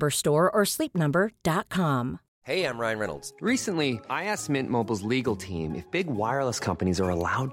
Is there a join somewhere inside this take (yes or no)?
yes